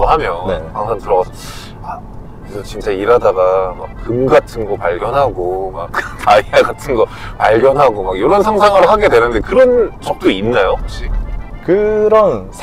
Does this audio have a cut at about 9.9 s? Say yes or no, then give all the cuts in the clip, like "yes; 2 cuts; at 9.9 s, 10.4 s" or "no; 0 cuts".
no; 0 cuts